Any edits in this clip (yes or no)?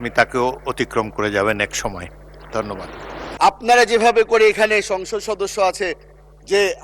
yes